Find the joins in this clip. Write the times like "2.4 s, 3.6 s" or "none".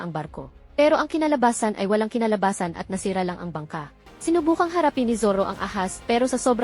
4.0 s